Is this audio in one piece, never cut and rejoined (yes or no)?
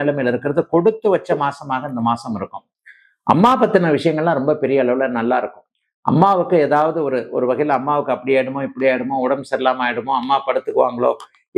yes